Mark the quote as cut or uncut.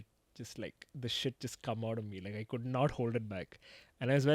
uncut